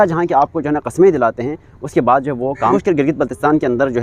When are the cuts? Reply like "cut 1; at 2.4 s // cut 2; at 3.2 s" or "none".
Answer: cut 1; at 2.7 s